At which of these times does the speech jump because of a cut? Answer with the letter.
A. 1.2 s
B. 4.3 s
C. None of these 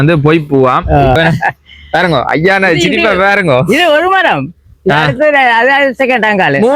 A